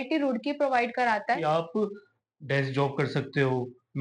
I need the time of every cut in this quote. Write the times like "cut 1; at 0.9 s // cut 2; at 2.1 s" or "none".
cut 1; at 1.4 s